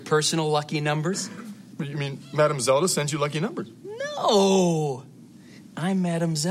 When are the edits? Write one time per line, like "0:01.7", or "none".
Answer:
none

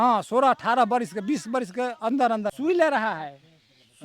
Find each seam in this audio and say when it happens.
0:02.6

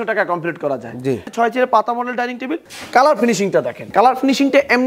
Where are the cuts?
0:01.3
0:02.7
0:03.8

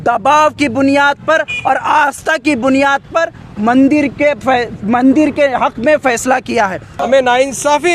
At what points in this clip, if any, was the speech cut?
0:06.9

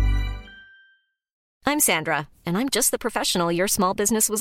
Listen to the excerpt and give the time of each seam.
0:01.4

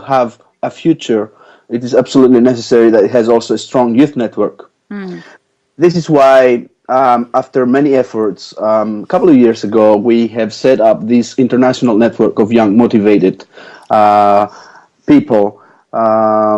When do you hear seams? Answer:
0:03.2

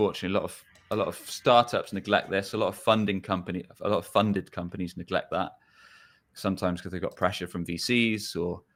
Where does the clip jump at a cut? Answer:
none

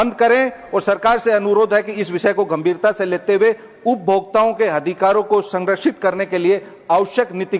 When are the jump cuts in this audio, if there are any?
none

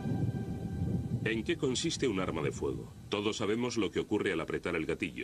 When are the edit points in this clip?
0:01.9

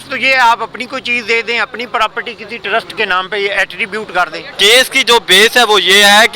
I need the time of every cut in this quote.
0:04.4

